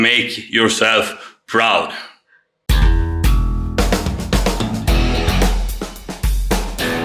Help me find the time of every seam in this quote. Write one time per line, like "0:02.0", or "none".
0:02.6